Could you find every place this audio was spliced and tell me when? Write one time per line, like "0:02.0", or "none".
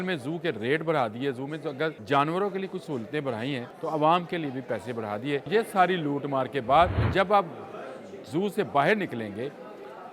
0:02.0
0:03.7
0:05.5
0:07.0